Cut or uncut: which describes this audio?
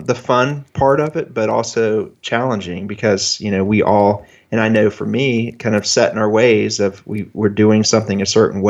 uncut